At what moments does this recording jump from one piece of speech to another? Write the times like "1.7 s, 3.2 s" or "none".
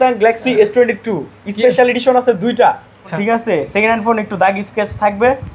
3.1 s